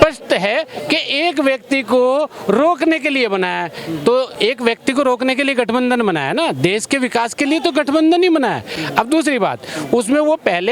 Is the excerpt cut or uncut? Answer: uncut